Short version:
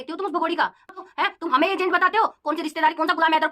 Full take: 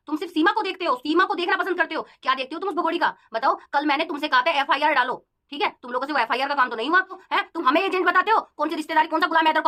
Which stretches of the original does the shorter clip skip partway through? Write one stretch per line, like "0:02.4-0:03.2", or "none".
0:03.3-0:07.1

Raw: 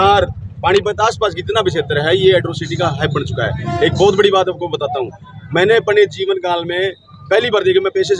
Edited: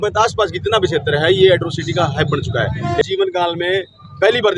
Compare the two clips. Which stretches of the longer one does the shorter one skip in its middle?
0:03.9-0:06.1

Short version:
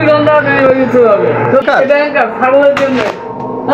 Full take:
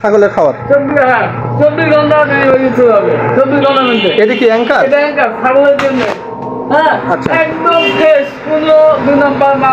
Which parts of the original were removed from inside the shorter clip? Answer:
0:03.5-0:04.7

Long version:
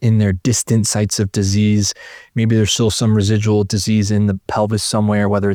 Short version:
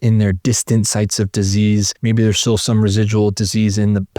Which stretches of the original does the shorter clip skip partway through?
0:01.9-0:02.3

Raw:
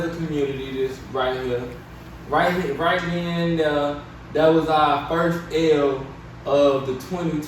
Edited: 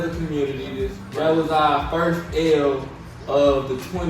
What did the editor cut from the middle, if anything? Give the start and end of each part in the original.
0:01.0-0:04.2

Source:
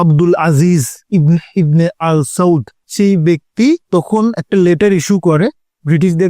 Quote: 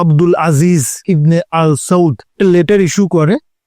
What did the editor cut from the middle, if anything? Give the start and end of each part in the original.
0:01.0-0:01.5
0:02.8-0:04.4

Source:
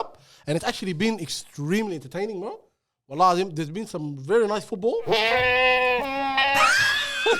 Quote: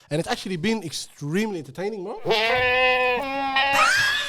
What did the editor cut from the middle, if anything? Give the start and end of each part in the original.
0:02.6-0:05.0

